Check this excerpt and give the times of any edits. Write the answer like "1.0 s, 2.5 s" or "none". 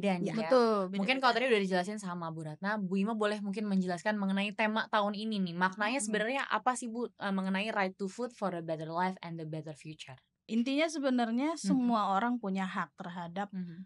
10.5 s